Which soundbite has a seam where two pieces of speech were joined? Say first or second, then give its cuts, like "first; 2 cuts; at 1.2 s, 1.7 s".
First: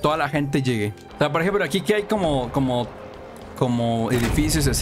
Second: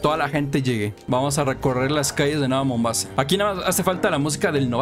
second; 2 cuts; at 1.0 s, 3.0 s